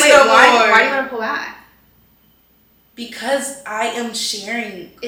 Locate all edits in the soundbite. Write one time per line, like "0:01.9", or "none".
none

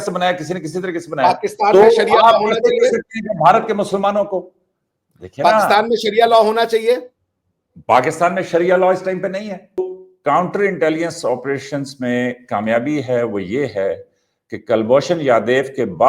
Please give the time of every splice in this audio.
0:09.8

